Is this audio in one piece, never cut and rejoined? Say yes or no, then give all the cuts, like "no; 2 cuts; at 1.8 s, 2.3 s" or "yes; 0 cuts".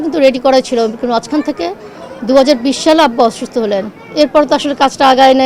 no; 1 cut; at 4.0 s